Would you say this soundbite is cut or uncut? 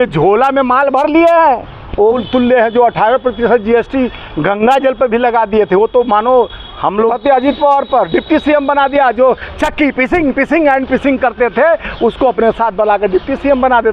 cut